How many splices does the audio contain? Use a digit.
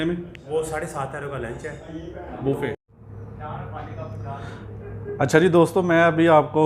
1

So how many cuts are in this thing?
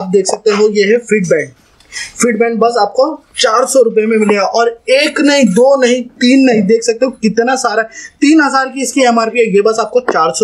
0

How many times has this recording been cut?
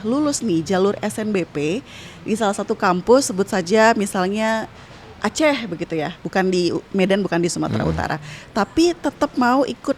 0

